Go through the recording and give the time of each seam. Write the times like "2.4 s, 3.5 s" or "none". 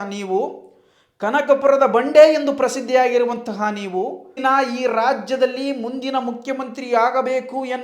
4.4 s